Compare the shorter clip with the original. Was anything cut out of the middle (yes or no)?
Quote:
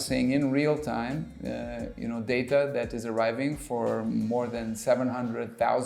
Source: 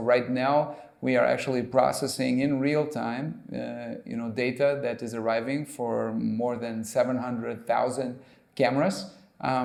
no